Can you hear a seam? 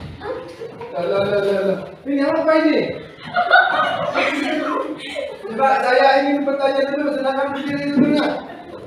no; 0 cuts

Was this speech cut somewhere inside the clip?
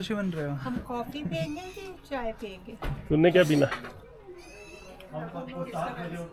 no; 0 cuts

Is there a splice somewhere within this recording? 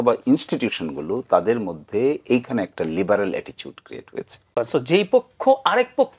yes; 1 cut; at 4.4 s

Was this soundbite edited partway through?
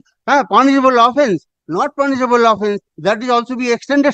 no; 0 cuts

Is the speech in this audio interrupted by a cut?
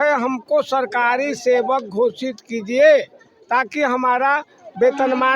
no; 0 cuts

